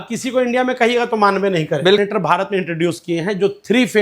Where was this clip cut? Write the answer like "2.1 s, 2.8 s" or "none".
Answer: 2.0 s